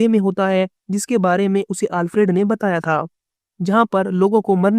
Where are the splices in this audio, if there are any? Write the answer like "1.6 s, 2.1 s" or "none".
3.3 s